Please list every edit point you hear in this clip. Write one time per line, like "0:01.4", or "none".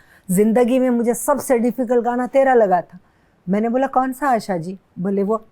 none